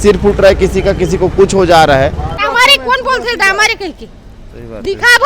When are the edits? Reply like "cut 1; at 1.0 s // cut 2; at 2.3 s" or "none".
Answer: cut 1; at 2.3 s